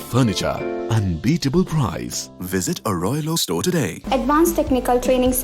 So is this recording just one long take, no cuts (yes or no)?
no